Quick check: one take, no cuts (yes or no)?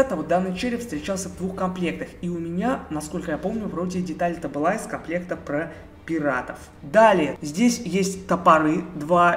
yes